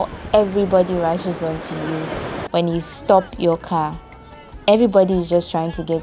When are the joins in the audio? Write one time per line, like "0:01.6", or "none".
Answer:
none